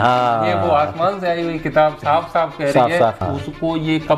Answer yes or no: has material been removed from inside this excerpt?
yes